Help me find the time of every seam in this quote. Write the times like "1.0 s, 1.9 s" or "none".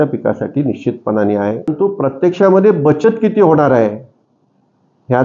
1.7 s